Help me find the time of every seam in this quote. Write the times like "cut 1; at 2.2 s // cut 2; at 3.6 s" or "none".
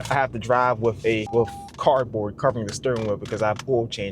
cut 1; at 1.3 s